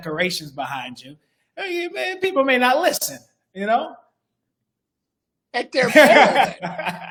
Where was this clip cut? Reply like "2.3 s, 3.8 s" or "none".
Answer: none